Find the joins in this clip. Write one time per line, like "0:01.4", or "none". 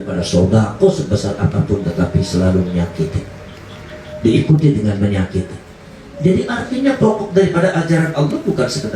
none